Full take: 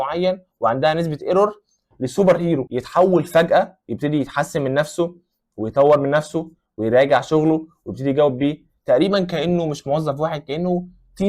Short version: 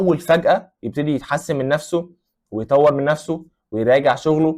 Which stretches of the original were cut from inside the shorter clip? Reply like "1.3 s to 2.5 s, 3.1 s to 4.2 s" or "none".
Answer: none